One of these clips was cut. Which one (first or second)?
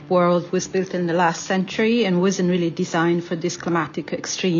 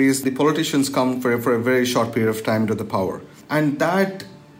second